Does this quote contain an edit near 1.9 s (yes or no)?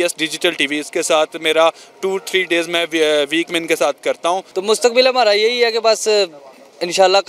no